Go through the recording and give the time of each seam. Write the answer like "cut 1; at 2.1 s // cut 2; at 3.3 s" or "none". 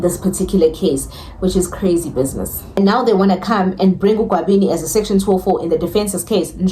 cut 1; at 2.8 s